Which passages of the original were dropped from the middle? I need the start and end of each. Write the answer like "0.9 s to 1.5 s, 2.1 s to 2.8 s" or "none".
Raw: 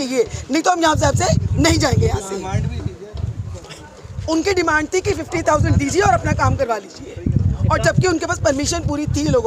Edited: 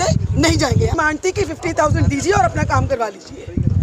2.2 s to 4.6 s